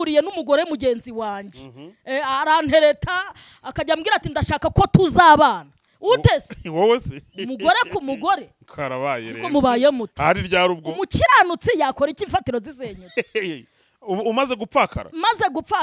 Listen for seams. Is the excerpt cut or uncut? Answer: uncut